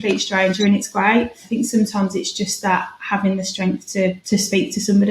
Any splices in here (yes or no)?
yes